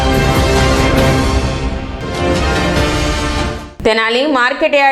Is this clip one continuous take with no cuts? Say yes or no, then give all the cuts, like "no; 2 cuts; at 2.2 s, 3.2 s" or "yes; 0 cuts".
no; 2 cuts; at 1.7 s, 3.6 s